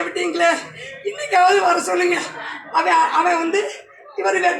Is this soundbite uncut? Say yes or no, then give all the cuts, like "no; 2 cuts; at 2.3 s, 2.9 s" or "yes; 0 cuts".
yes; 0 cuts